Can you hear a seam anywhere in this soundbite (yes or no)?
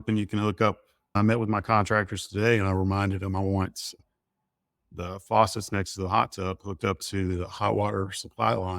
yes